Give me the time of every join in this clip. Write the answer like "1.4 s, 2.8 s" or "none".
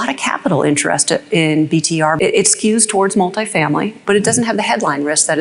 2.2 s, 3.9 s

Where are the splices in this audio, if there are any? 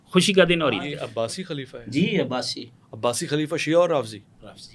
1.0 s

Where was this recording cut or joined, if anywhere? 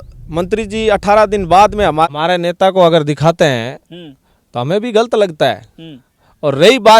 2.1 s

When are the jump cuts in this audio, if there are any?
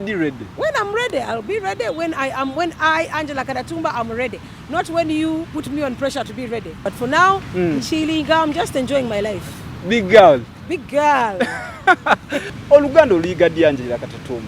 6.8 s, 12.4 s

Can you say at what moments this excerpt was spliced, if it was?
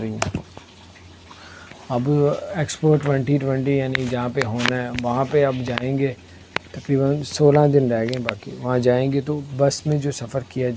none

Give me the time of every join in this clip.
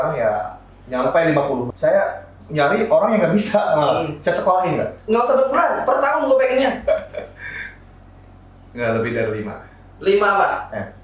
1.7 s, 5.0 s

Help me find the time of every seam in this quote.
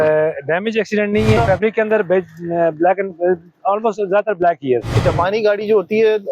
1.4 s, 5.0 s

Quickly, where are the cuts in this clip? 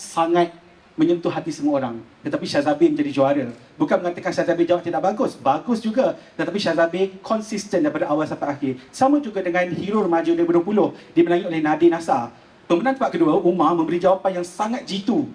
none

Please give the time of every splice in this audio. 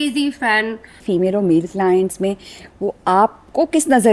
1.0 s

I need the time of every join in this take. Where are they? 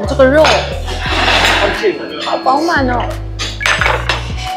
none

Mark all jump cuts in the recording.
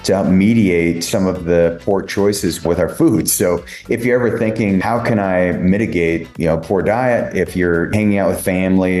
1.0 s, 2.6 s, 4.8 s, 6.3 s, 7.9 s

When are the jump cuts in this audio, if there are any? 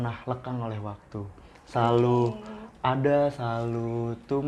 none

